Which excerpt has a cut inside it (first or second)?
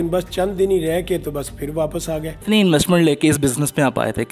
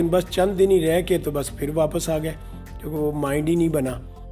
first